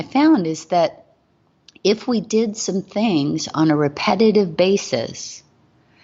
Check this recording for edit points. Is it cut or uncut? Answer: uncut